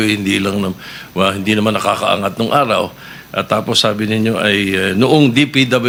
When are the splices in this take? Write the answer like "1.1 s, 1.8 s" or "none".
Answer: none